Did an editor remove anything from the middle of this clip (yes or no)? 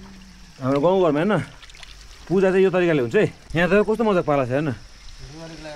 yes